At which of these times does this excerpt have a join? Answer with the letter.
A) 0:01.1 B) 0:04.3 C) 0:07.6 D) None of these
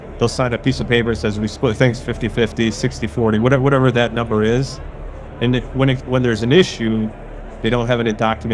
D